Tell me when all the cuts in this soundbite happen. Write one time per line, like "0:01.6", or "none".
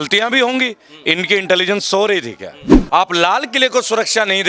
0:02.7